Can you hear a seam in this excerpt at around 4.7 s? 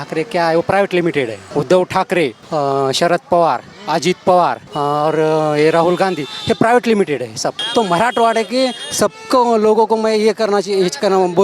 yes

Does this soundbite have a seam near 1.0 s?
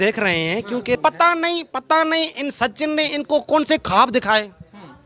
yes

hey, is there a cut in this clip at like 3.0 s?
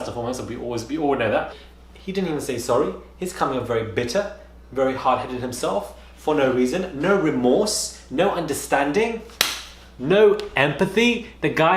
no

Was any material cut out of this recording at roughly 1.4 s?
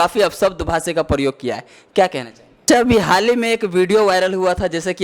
no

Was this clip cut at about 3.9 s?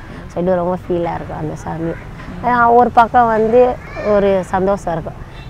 yes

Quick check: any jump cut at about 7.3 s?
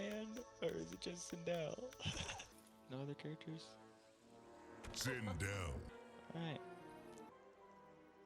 yes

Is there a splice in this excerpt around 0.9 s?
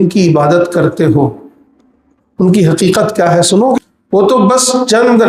no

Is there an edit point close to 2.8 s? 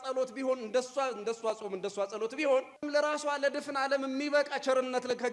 yes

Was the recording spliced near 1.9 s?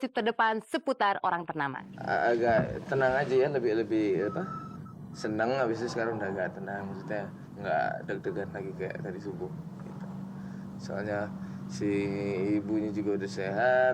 yes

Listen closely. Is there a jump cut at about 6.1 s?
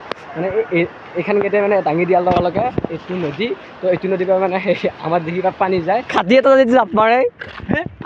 yes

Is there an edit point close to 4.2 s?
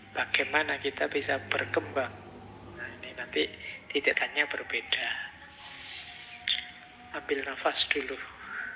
yes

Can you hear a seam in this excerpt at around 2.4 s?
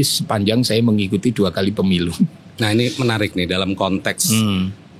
no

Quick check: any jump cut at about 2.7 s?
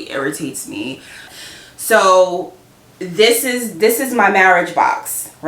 no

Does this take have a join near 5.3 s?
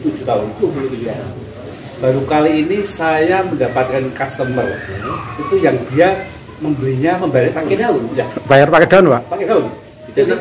no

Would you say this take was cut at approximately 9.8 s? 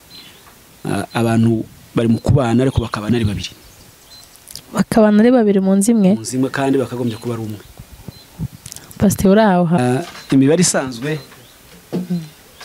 yes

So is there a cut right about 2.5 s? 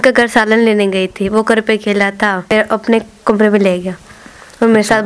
yes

